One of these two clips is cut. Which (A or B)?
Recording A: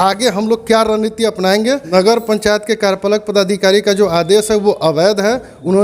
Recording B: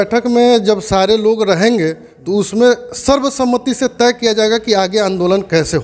A